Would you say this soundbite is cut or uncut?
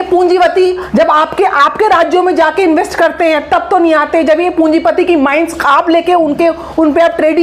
uncut